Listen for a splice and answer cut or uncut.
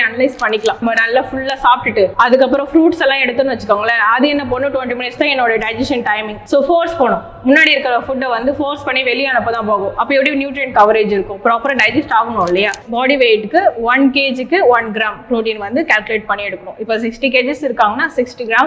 cut